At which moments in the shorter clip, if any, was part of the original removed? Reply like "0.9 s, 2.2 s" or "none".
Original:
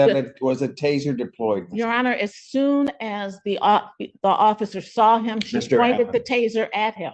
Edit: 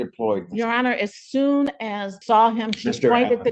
2.1 s

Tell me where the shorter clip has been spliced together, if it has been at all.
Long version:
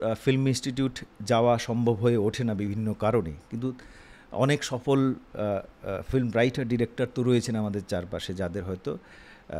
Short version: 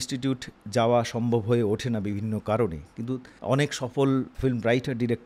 3.3 s, 4.3 s

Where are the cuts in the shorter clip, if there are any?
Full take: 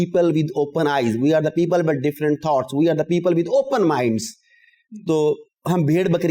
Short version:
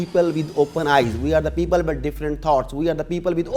none

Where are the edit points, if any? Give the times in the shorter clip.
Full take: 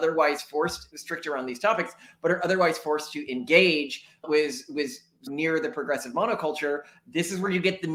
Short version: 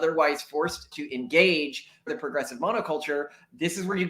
1.0 s, 2.1 s

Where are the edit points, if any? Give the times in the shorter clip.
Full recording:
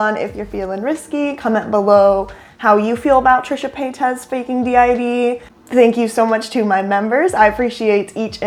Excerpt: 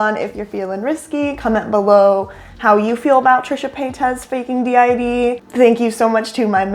5.4 s

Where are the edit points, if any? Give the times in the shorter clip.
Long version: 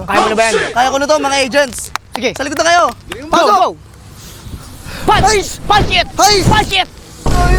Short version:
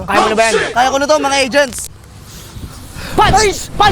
2.0 s

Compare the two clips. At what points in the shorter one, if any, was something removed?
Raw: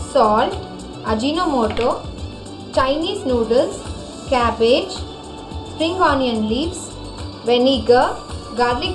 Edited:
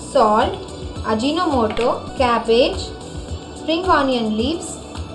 2.1 s

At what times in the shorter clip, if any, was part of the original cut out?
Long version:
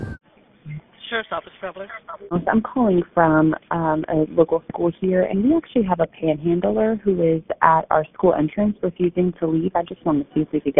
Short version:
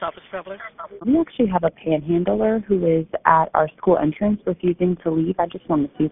1.0 s

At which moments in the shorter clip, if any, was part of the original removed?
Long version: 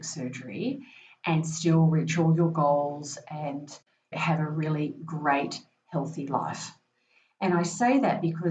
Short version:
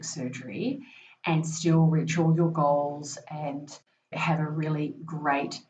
none

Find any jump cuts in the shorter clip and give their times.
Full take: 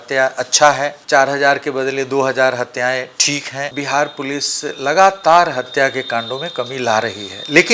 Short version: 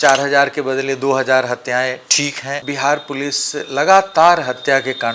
none

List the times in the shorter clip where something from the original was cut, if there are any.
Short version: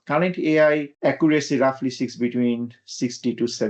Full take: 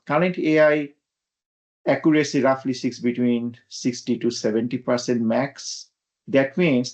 0.9 s

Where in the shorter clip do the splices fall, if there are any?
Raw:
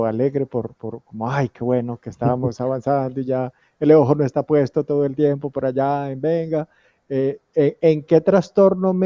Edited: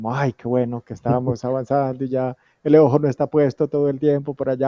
none

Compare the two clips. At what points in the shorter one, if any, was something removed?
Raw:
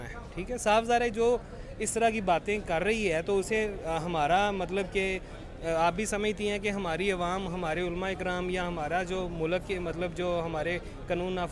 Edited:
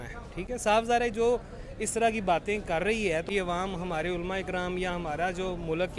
3.3 s

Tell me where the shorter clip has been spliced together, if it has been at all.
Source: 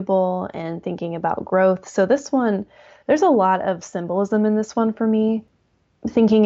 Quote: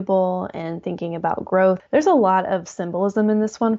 1.8 s

